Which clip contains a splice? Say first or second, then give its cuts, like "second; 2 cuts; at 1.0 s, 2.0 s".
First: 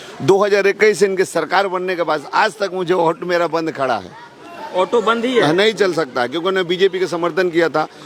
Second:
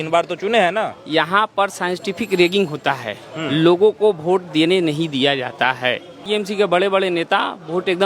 second; 1 cut; at 6.2 s